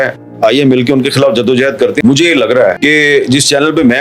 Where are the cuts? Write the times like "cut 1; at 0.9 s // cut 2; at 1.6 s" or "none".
cut 1; at 2.0 s